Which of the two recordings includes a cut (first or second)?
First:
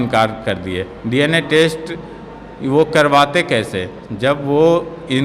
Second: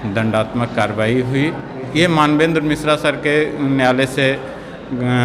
second